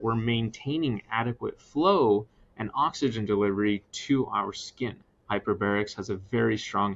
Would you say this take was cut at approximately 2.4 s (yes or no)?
no